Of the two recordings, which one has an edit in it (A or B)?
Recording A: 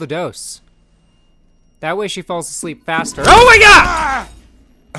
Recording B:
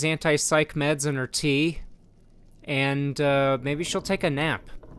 A